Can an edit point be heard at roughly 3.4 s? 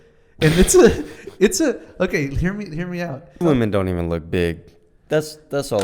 yes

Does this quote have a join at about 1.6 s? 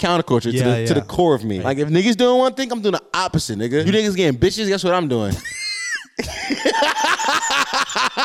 yes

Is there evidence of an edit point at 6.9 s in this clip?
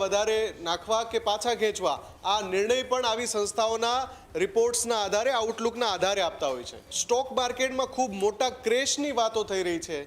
yes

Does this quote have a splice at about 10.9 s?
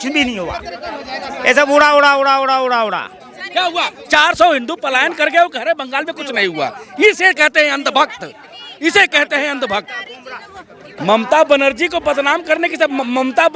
yes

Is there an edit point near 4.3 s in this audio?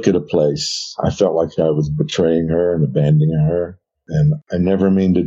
yes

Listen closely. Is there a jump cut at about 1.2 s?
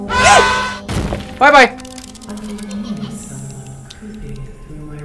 no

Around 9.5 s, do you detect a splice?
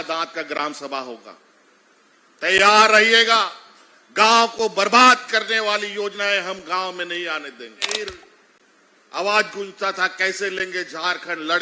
no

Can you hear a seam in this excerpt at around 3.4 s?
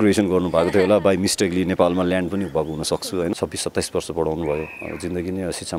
yes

